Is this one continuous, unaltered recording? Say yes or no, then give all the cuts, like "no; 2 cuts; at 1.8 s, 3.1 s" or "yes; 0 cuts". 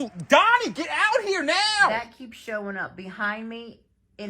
no; 1 cut; at 1.9 s